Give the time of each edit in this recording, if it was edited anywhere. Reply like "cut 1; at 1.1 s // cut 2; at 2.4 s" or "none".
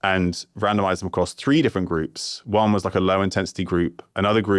none